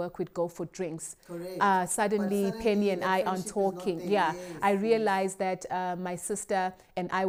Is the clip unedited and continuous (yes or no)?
yes